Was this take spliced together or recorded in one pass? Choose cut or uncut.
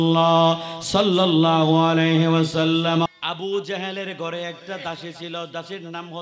cut